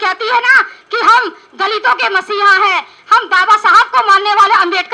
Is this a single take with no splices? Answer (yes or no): yes